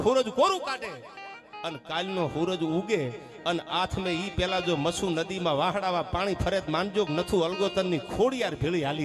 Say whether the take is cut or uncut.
uncut